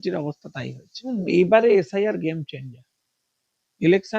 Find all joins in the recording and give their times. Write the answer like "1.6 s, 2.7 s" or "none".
1.1 s